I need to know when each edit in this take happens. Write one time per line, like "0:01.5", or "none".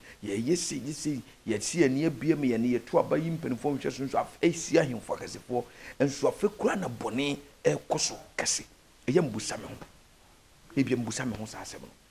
none